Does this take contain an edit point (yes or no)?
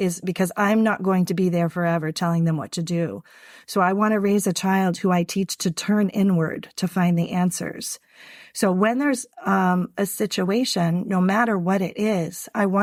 no